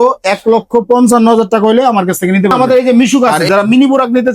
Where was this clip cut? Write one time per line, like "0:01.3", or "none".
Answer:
0:02.5